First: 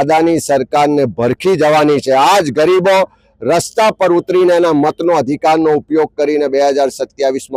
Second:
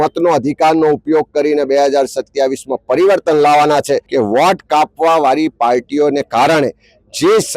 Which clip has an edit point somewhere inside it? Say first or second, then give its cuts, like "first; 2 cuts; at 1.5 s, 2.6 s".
second; 1 cut; at 4.1 s